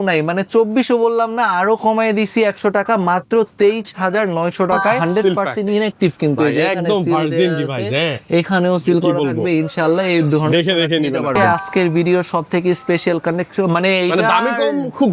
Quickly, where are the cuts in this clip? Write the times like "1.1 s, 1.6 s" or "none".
5.0 s, 11.4 s